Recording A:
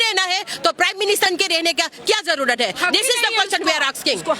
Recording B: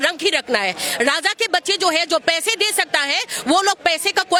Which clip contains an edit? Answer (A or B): A